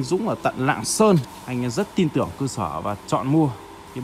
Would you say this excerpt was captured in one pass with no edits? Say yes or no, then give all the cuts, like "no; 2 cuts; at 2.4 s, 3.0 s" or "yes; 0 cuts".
no; 1 cut; at 1.4 s